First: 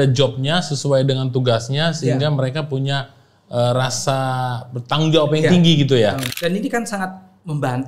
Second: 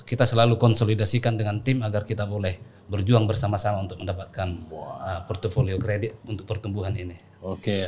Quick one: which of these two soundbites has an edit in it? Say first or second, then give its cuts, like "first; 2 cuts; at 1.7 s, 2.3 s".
first; 1 cut; at 6.3 s